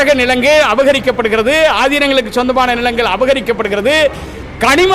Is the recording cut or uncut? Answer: uncut